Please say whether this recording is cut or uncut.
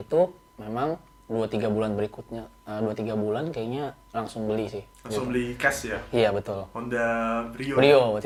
uncut